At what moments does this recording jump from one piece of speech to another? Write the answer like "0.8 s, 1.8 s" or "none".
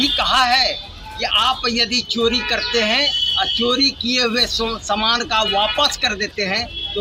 none